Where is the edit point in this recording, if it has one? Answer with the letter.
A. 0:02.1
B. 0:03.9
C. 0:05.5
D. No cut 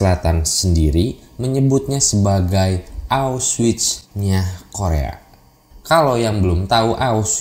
D